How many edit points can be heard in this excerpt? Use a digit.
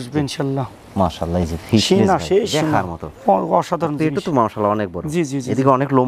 0